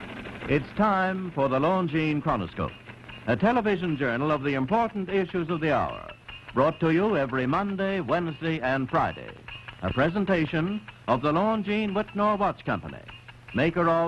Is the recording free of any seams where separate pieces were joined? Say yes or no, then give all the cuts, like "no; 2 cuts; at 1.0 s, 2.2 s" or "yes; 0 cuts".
no; 1 cut; at 4.0 s